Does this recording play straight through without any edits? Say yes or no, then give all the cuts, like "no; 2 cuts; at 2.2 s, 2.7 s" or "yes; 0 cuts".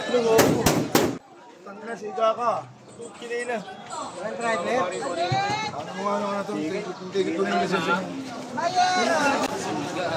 no; 2 cuts; at 1.2 s, 9.5 s